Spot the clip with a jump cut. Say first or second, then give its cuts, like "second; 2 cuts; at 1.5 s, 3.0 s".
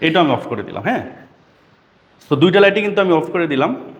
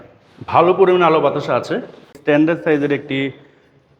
second; 1 cut; at 2.2 s